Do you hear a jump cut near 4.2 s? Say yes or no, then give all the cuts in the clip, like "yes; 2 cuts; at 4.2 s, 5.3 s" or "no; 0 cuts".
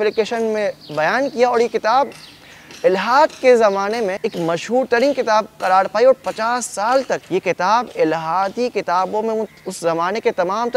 yes; 2 cuts; at 4.2 s, 7.2 s